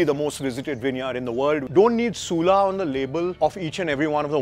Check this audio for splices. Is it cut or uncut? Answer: cut